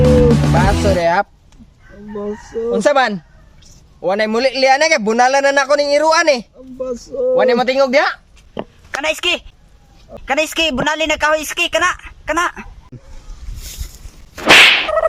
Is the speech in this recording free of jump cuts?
yes; 0 cuts

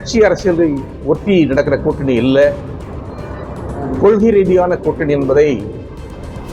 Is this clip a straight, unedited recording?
yes; 0 cuts

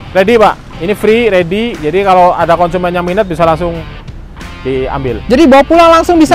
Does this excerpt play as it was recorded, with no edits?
yes; 0 cuts

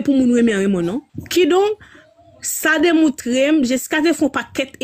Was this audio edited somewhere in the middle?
yes; 1 cut; at 1.1 s

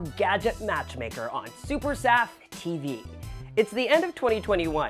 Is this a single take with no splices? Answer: yes; 0 cuts

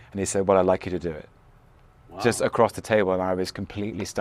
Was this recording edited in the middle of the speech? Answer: no; 0 cuts

